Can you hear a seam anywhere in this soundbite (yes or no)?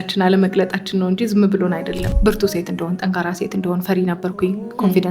yes